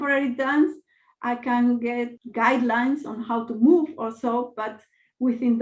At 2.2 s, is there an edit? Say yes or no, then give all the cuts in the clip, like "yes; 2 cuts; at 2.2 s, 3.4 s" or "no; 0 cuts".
yes; 1 cut; at 2.2 s